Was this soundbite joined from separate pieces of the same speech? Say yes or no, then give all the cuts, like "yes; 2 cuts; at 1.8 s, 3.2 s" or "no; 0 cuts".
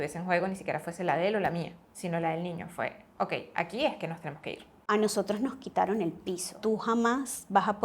yes; 3 cuts; at 1.8 s, 4.7 s, 6.5 s